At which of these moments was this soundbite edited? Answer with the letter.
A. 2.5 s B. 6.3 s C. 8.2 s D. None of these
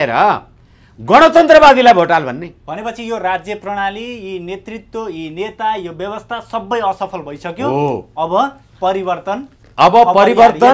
A